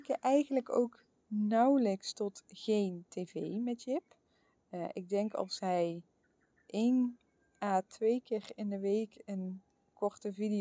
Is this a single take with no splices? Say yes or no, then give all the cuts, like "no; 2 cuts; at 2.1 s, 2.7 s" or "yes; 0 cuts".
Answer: yes; 0 cuts